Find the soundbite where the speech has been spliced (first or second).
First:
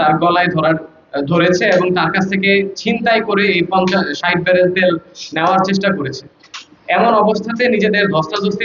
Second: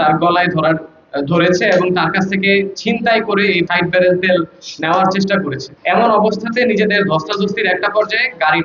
second